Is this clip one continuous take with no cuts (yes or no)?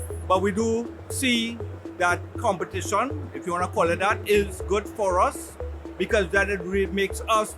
no